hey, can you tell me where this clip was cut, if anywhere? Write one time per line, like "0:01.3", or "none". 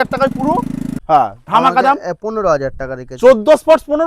0:00.9